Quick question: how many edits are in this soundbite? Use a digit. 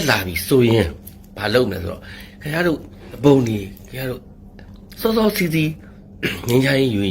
1